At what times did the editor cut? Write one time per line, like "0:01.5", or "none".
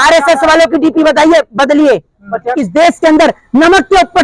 0:02.5

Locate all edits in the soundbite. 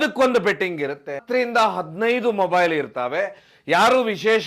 0:01.2

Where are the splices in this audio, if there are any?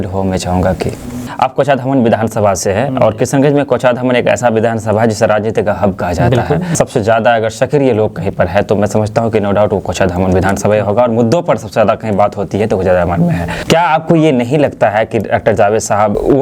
0:01.3
0:13.5

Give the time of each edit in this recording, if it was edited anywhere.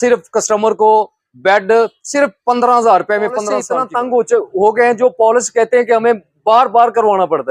0:03.7

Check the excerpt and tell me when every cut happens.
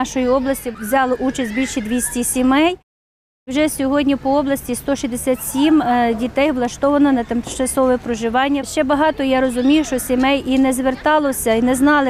0:03.2
0:08.7

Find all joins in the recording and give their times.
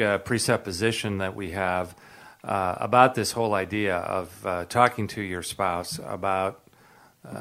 none

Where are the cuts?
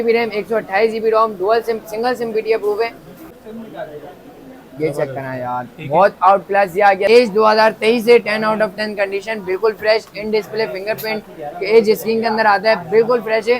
0:03.2
0:07.1

